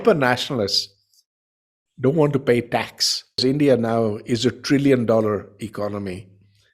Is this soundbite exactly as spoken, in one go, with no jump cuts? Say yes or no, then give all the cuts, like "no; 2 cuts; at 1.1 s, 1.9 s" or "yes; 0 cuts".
no; 1 cut; at 3.4 s